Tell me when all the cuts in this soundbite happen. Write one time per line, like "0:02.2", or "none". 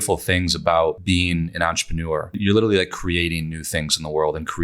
0:01.0
0:02.4